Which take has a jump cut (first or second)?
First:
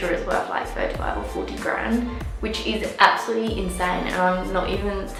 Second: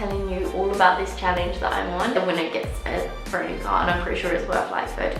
second